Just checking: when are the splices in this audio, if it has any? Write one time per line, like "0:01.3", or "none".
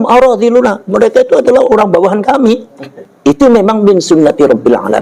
0:03.4